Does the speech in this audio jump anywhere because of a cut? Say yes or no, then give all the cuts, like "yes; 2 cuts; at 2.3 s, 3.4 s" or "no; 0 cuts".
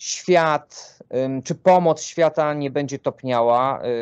no; 0 cuts